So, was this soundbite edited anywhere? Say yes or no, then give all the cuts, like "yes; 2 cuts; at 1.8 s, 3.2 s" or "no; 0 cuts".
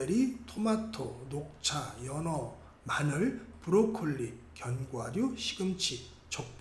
no; 0 cuts